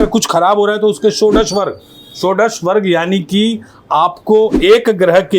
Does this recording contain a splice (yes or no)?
no